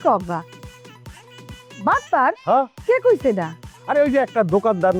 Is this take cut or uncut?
uncut